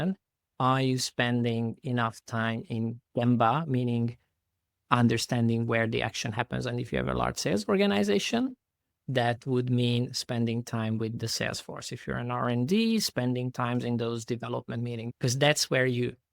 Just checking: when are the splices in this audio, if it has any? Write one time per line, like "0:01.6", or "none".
0:15.1